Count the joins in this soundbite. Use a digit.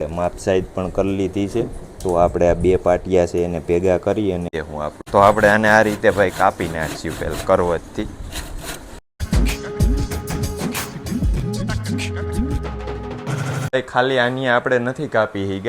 2